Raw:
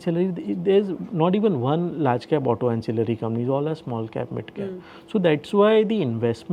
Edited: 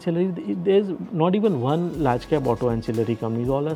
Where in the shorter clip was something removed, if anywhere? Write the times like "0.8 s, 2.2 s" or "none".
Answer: none